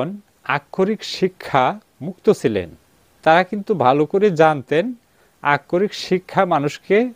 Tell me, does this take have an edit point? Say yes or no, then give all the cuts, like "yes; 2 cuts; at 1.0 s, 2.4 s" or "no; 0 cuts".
yes; 1 cut; at 3.1 s